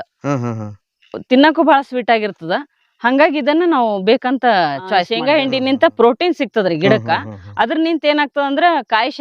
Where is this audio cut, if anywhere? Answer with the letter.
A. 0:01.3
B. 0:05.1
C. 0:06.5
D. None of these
B